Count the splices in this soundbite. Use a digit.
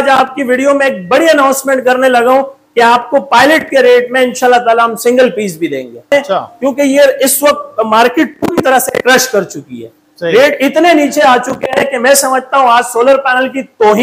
1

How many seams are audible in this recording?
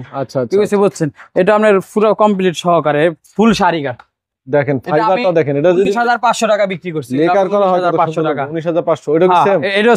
0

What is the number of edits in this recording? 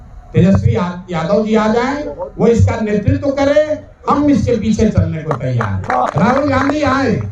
1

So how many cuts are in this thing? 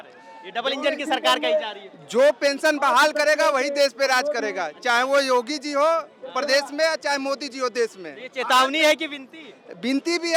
0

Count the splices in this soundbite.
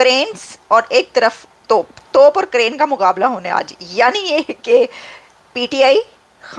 1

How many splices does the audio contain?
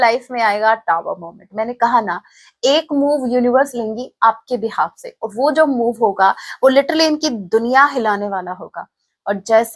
0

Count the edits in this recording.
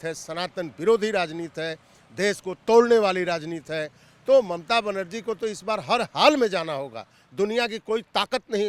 0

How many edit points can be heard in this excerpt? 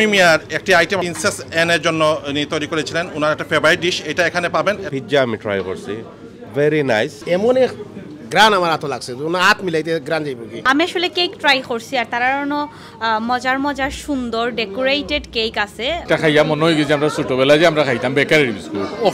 5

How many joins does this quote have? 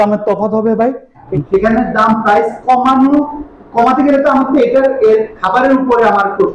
1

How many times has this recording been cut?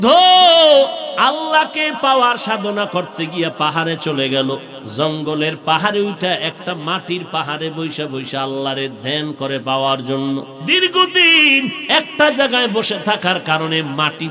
3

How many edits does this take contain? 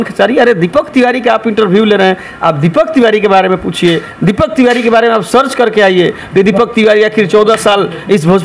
0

